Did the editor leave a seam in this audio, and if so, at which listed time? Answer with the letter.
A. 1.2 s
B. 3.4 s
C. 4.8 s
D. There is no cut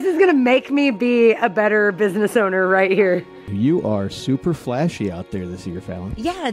B